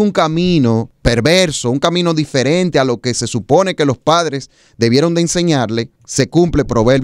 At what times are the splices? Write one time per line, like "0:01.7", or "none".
0:00.9
0:06.0

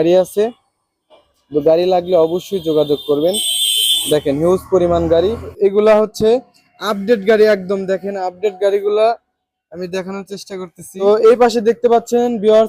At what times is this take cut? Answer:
0:05.5
0:11.0

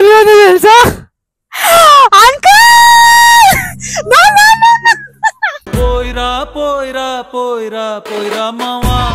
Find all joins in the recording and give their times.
none

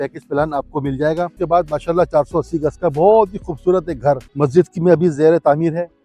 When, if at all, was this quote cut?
0:01.3
0:04.3

